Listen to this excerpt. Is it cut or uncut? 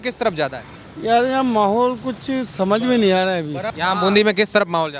cut